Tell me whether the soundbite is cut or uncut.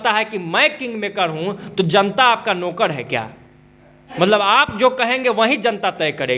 uncut